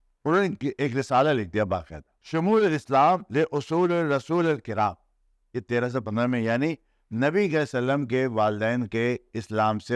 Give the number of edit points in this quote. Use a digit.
1